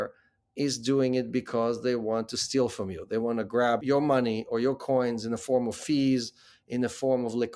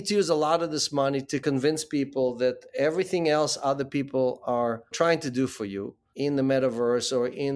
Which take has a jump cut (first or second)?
second